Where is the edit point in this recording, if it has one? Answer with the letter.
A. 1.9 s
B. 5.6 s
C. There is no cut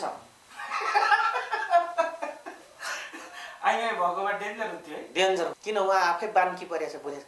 B